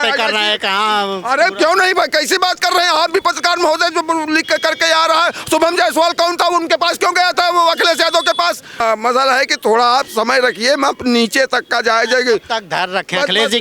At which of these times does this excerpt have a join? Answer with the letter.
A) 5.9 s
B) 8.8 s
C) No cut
B